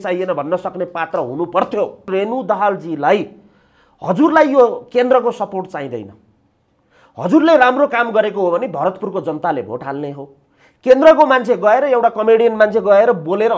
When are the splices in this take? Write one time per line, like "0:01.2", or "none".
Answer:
0:02.1